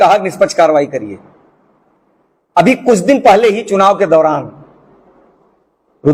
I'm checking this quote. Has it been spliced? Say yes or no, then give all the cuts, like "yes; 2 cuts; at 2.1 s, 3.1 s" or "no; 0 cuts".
no; 0 cuts